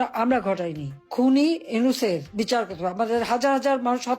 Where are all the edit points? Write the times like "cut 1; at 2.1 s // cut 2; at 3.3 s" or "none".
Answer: cut 1; at 1.0 s